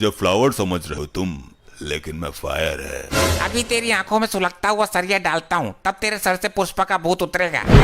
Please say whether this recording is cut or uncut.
cut